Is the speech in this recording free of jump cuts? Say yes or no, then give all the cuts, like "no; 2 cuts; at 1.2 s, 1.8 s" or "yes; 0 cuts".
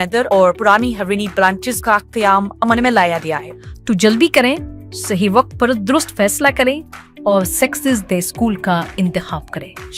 no; 1 cut; at 3.5 s